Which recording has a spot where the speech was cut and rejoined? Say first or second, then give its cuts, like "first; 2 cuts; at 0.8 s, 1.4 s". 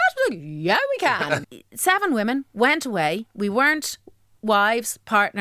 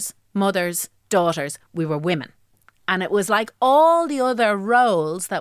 first; 2 cuts; at 1.5 s, 3.3 s